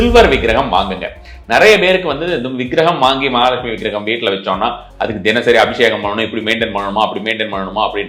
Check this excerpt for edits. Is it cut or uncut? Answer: uncut